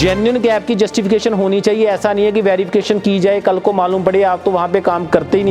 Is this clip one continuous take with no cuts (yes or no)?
yes